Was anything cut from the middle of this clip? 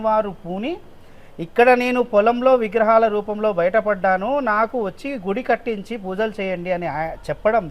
no; 0 cuts

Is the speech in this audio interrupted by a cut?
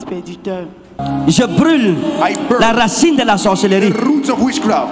yes; 1 cut; at 1.0 s

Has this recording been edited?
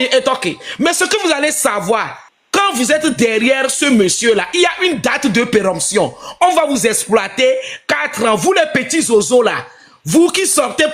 no; 0 cuts

